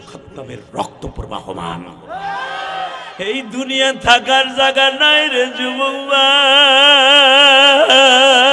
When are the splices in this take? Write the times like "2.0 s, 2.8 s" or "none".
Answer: 3.1 s

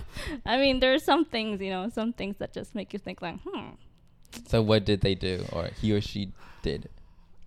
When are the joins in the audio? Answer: none

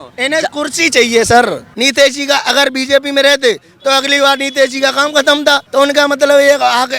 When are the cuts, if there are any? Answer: 1.7 s, 5.6 s

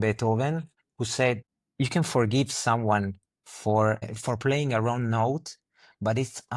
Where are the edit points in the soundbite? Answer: 1.6 s, 4.1 s

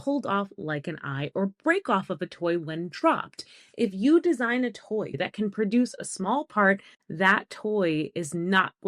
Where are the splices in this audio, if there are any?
5.2 s, 7.0 s

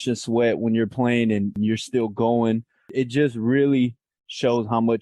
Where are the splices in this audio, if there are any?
1.6 s, 2.9 s

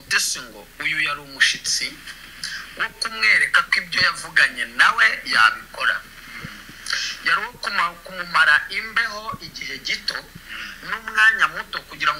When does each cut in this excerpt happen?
none

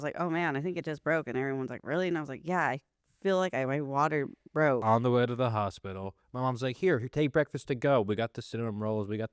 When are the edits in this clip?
4.8 s

